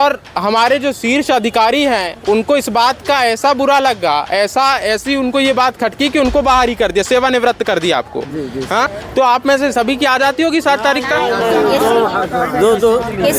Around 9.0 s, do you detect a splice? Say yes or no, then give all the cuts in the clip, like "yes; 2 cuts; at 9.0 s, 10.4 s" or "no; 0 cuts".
yes; 1 cut; at 9.0 s